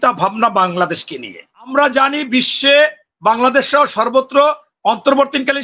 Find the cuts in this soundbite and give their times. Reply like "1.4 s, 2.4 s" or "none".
1.7 s